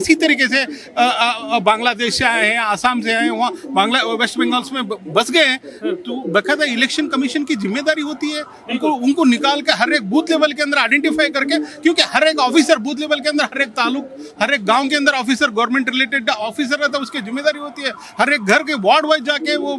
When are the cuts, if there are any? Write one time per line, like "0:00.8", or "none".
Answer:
none